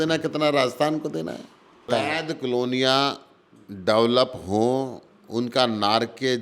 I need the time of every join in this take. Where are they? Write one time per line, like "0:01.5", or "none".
0:01.9